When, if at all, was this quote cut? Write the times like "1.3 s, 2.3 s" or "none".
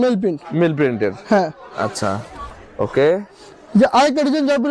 none